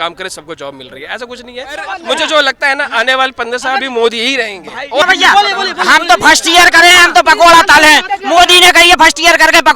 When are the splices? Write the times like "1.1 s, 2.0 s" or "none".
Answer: 1.9 s, 5.0 s